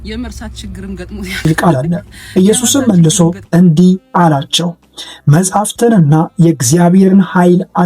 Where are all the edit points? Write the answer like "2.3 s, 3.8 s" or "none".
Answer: 1.5 s